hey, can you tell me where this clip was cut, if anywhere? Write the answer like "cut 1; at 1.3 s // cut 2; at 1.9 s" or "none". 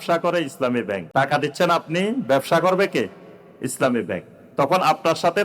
cut 1; at 1.0 s